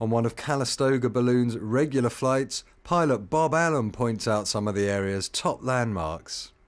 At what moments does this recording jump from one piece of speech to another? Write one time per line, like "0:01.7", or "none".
0:02.3